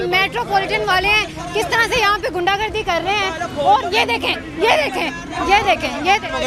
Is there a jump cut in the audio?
no; 0 cuts

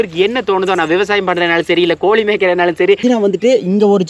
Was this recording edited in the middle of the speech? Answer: yes; 1 cut; at 3.0 s

